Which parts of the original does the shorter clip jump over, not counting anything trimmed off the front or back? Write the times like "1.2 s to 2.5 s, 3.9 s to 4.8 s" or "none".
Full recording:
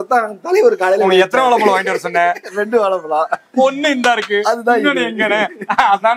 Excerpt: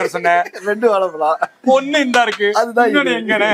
none